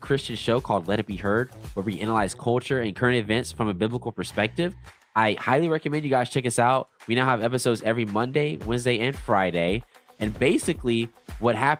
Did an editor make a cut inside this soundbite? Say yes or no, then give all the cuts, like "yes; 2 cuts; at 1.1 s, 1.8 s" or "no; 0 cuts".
no; 0 cuts